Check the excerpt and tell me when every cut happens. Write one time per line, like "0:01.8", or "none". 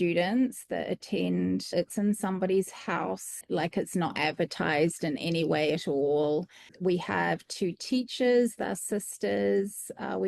0:01.7
0:03.3
0:06.7